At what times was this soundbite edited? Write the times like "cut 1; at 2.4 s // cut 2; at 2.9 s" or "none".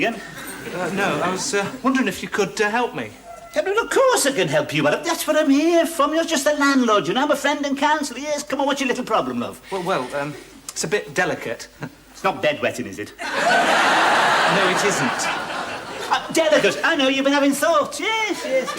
cut 1; at 17.1 s